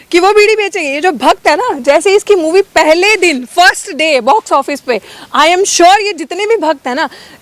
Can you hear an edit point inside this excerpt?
no; 0 cuts

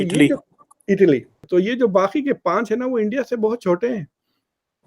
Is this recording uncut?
no; 1 cut; at 1.4 s

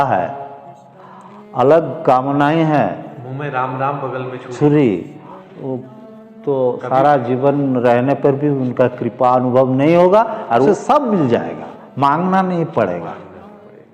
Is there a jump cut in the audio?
yes; 1 cut; at 10.7 s

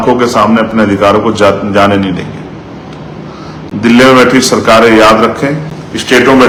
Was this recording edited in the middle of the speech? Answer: no; 0 cuts

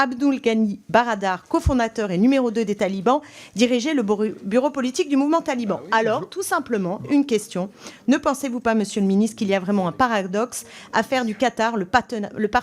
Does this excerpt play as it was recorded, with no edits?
yes; 0 cuts

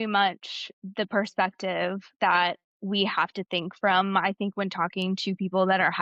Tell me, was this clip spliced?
no; 0 cuts

